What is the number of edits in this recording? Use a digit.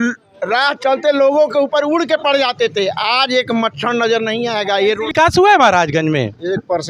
1